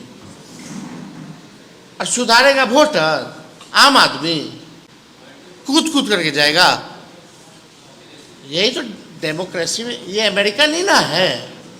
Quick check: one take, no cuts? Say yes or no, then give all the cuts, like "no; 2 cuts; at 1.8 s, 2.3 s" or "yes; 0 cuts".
yes; 0 cuts